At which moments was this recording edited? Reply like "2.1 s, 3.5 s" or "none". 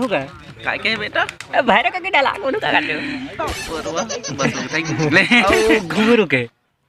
none